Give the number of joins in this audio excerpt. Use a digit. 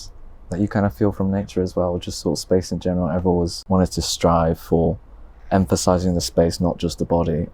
1